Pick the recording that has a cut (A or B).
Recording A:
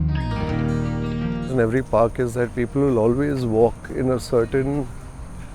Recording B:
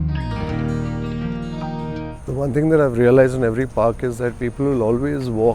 A